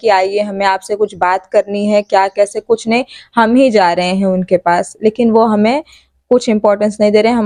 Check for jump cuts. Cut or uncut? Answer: uncut